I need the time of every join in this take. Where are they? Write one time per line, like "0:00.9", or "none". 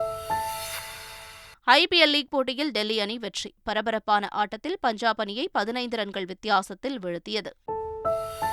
0:07.6